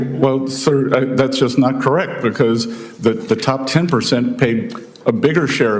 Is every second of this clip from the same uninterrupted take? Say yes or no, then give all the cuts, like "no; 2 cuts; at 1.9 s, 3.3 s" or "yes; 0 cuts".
yes; 0 cuts